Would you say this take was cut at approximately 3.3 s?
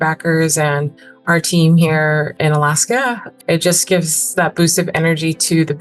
yes; 2 cuts; at 2.3 s, 3.3 s

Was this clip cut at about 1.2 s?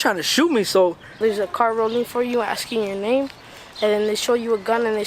yes; 1 cut; at 1.2 s

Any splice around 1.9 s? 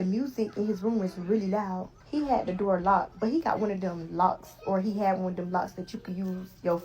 yes; 1 cut; at 1.9 s

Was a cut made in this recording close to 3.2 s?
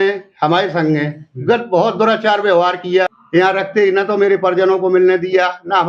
yes; 1 cut; at 3.2 s

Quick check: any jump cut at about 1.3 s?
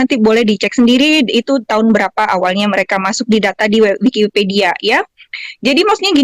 no; 0 cuts

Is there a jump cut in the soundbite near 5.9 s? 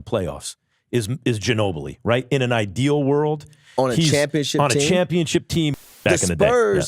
yes; 1 cut; at 5.9 s

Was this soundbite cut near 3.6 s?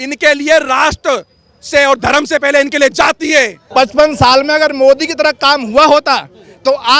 yes; 1 cut; at 3.6 s

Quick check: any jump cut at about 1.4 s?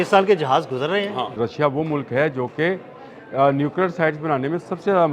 yes; 1 cut; at 1.4 s

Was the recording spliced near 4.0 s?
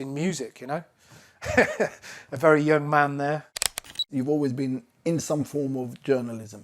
yes; 1 cut; at 4.0 s

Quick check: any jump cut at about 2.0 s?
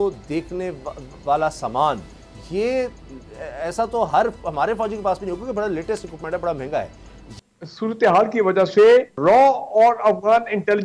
no; 1 cut; at 7.4 s

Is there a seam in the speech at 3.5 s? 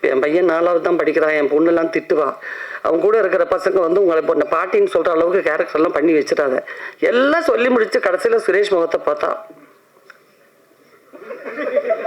no; 1 cut; at 6.8 s

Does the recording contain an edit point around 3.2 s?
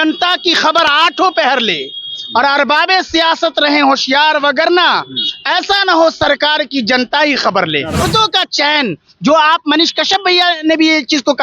no; 1 cut; at 8.0 s

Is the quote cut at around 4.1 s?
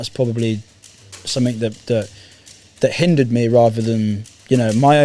no; 0 cuts

